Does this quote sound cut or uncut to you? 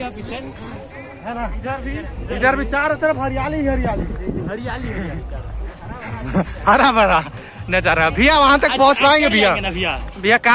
uncut